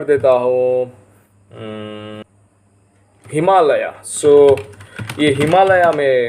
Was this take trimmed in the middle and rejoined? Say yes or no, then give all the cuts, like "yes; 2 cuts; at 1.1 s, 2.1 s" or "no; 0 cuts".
yes; 1 cut; at 2.2 s